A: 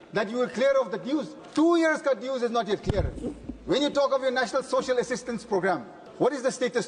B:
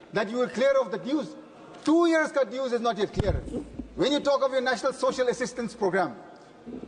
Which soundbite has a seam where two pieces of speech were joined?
A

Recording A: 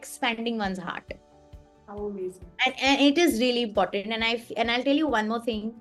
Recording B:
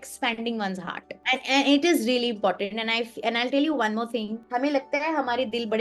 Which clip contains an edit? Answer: B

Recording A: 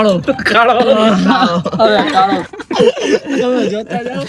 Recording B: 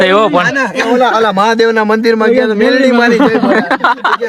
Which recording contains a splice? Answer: A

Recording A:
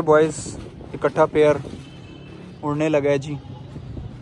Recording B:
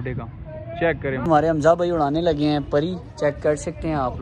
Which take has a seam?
B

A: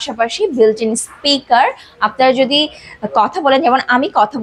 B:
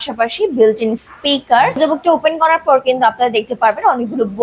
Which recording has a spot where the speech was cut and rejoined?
B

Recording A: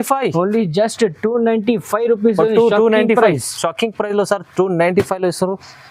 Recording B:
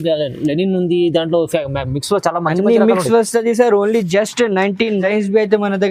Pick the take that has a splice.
B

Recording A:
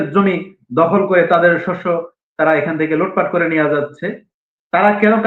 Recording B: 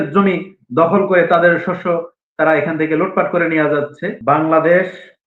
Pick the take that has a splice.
B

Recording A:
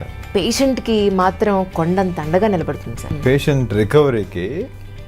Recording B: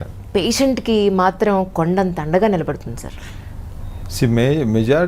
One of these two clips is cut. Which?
A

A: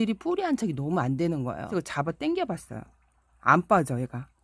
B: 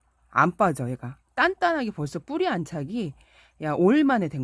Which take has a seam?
A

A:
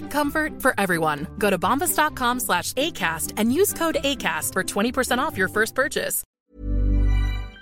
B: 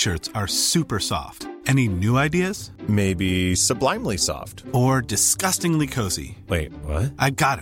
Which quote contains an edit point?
A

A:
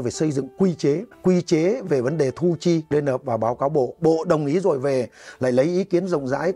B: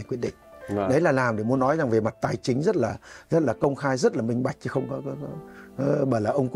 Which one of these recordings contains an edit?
A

